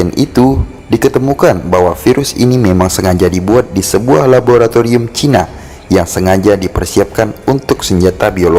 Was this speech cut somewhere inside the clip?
no; 0 cuts

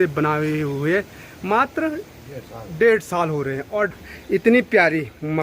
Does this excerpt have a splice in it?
yes; 1 cut; at 3.9 s

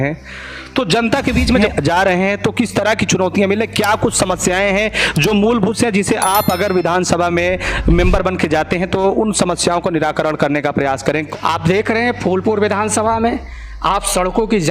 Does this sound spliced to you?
yes; 2 cuts; at 1.6 s, 11.3 s

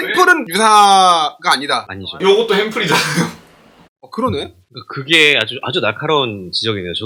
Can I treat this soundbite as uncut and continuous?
yes; 0 cuts

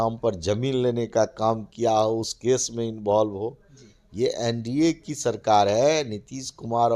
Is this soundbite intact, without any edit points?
yes; 0 cuts

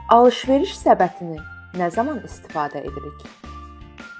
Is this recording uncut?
no; 1 cut; at 3.1 s

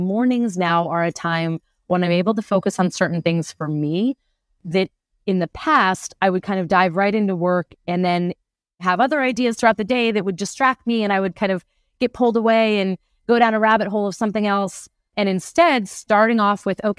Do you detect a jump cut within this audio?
yes; 1 cut; at 8.8 s

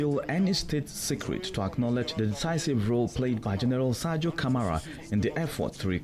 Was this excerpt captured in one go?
no; 1 cut; at 4.9 s

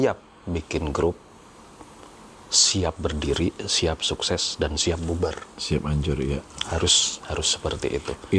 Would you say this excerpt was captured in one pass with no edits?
yes; 0 cuts

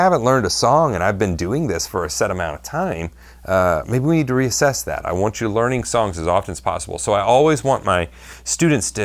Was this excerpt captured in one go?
yes; 0 cuts

